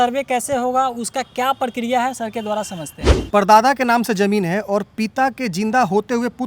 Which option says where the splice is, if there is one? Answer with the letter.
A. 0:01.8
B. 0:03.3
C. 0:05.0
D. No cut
B